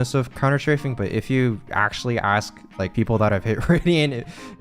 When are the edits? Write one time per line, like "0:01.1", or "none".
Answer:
0:02.9